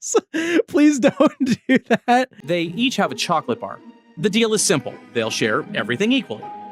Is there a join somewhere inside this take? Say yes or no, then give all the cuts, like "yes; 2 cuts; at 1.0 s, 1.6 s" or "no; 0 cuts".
yes; 1 cut; at 2.4 s